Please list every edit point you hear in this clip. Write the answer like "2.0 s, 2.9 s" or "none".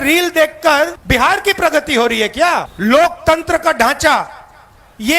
1.0 s, 2.7 s